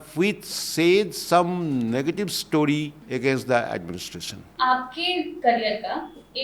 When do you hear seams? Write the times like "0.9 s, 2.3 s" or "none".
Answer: 3.0 s, 4.4 s, 5.3 s